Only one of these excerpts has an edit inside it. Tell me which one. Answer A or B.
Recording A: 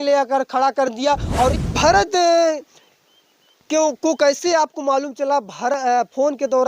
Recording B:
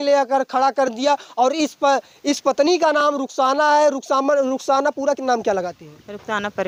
A